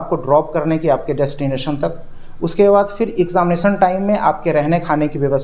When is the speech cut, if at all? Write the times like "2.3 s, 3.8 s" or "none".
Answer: none